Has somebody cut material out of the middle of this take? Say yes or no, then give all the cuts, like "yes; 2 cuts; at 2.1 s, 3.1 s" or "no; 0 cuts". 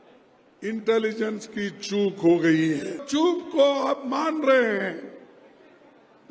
yes; 1 cut; at 3.0 s